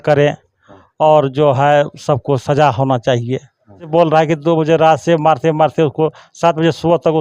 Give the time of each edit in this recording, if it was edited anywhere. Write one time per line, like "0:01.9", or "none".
0:03.9